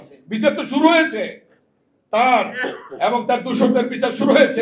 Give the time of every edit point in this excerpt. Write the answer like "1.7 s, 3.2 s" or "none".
none